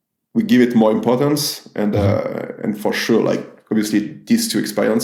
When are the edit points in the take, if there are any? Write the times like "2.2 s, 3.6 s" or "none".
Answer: none